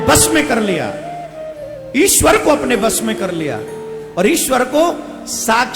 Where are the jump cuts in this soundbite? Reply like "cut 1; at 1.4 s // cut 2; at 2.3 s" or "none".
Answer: none